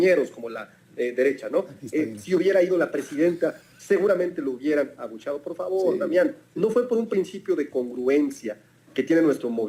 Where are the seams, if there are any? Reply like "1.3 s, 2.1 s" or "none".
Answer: none